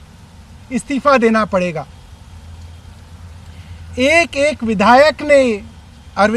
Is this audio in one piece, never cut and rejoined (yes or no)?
yes